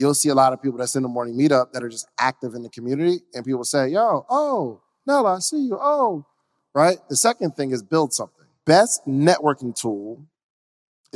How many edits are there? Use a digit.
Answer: 1